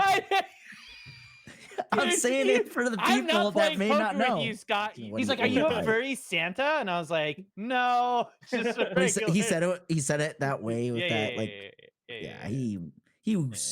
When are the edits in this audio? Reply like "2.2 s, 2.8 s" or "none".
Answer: 5.0 s